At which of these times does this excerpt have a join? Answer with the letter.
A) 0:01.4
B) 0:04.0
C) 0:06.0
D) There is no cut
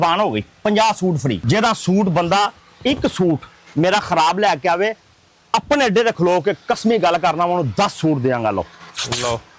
A